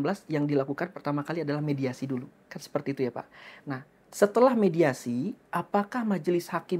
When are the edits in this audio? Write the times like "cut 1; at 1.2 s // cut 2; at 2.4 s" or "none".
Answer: none